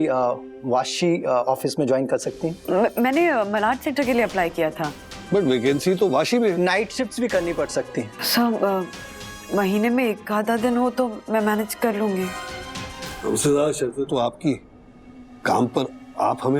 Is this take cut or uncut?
cut